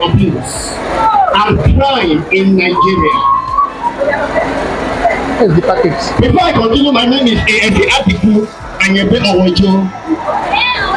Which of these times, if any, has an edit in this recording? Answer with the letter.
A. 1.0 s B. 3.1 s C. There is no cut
C